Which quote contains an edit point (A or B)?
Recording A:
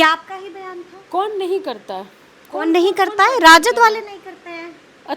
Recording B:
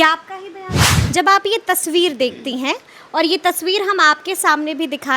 B